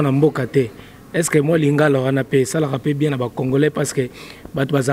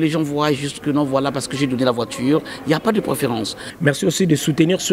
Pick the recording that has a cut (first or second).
second